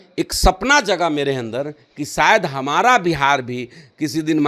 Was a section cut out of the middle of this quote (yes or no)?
no